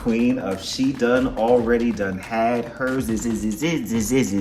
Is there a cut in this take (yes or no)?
no